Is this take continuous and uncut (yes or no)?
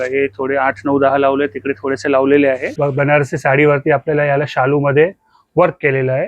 no